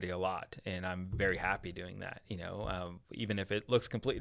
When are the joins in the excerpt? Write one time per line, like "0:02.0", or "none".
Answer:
none